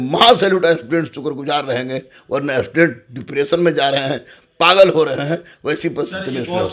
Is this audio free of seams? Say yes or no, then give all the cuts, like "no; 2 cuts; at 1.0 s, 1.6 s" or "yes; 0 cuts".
yes; 0 cuts